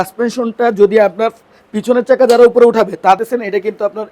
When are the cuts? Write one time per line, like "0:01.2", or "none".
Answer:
0:03.2